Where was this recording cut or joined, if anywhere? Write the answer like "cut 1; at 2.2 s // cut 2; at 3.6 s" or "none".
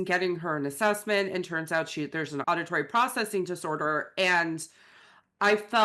cut 1; at 2.4 s